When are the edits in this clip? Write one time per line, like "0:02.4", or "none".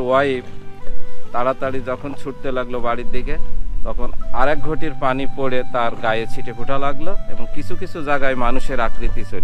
none